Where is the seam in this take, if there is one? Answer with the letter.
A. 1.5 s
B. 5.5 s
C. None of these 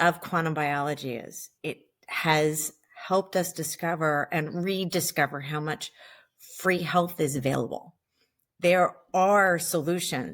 A